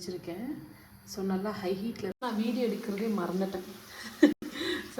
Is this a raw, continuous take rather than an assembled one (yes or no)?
no